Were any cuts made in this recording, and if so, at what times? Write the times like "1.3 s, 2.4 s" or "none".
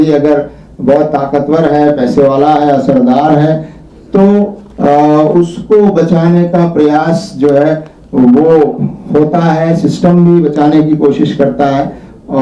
none